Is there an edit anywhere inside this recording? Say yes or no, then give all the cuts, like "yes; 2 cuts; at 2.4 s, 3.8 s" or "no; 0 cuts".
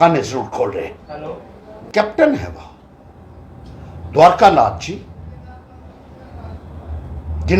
yes; 1 cut; at 1.9 s